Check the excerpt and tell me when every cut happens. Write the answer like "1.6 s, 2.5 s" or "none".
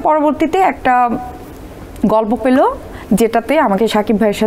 none